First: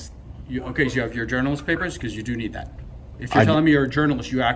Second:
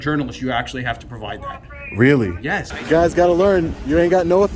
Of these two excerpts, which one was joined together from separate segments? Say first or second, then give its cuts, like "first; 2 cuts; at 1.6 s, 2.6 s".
second; 1 cut; at 2.7 s